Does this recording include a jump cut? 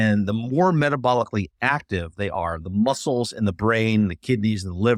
no; 0 cuts

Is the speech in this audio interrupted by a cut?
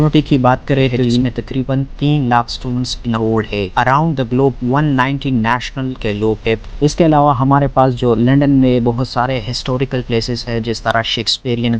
yes; 3 cuts; at 1.2 s, 3.7 s, 6.7 s

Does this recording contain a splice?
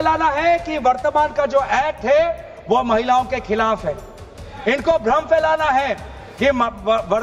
no; 0 cuts

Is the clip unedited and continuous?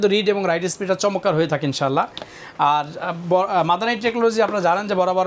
yes; 0 cuts

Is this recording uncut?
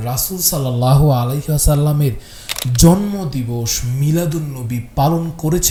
yes; 0 cuts

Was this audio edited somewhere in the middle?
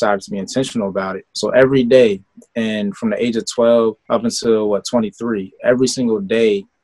yes; 2 cuts; at 1.2 s, 4.0 s

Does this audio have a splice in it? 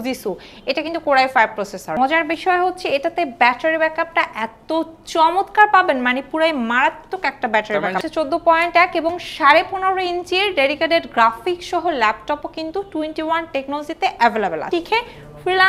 yes; 3 cuts; at 1.9 s, 8.0 s, 14.6 s

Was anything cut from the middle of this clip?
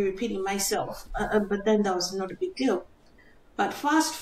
no; 0 cuts

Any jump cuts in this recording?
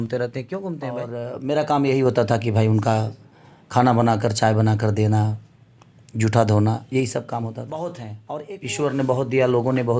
yes; 2 cuts; at 1.2 s, 8.1 s

